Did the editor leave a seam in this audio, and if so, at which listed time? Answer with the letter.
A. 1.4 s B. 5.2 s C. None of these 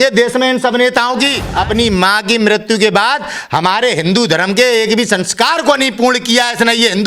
A